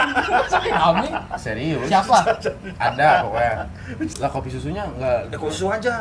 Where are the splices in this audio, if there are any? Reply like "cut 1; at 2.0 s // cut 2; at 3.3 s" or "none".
cut 1; at 4.1 s